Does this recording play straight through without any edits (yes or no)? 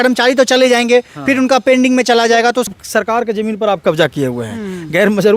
no